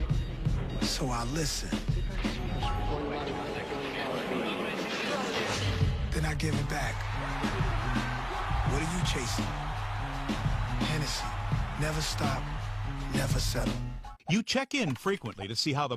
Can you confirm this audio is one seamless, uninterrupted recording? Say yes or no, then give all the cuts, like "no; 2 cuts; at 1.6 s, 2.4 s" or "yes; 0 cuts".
no; 1 cut; at 14.2 s